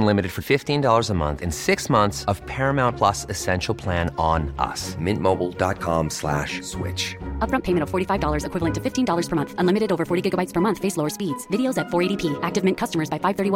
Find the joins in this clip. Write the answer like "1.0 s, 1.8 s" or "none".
none